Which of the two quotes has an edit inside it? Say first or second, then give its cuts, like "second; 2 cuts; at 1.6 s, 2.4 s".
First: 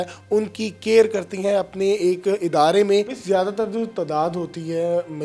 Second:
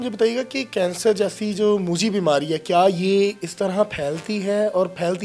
first; 1 cut; at 3.2 s